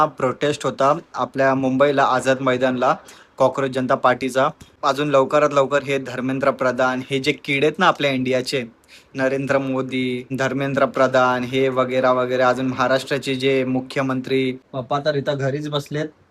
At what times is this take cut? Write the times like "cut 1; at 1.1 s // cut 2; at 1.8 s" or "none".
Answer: cut 1; at 4.7 s // cut 2; at 10.3 s // cut 3; at 14.7 s